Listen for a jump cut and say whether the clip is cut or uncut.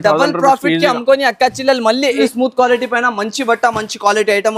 cut